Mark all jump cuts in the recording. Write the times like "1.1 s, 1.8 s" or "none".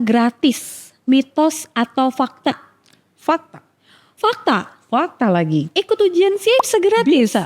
none